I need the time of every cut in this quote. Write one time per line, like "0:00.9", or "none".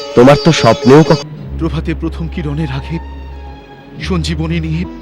0:01.2